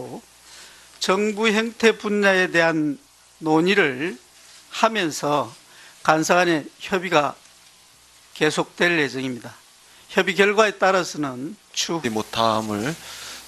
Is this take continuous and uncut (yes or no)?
yes